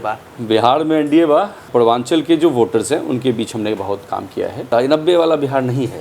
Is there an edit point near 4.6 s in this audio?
yes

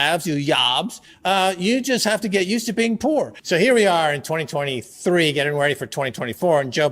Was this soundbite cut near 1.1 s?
no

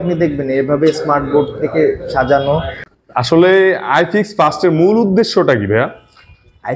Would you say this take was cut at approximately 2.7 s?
yes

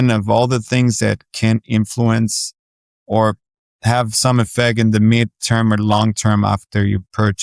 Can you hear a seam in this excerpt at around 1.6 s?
no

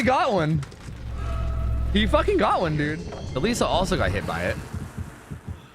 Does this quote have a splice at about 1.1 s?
no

